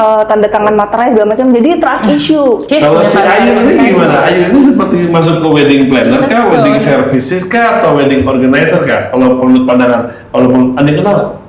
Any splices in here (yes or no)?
yes